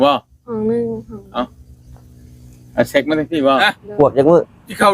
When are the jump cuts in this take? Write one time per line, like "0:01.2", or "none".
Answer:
0:03.6